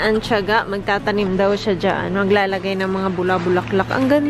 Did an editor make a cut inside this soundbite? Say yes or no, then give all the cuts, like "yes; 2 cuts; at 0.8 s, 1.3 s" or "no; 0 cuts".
no; 0 cuts